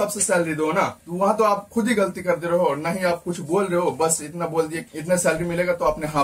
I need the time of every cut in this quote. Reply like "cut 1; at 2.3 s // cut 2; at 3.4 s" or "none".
cut 1; at 1.0 s // cut 2; at 4.9 s